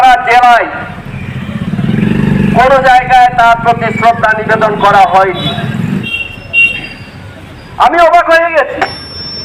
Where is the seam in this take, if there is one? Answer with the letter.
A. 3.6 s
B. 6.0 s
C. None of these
B